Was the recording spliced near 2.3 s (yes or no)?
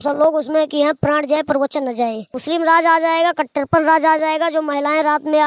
yes